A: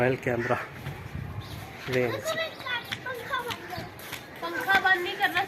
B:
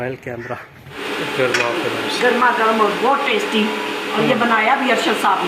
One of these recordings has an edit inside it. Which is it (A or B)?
B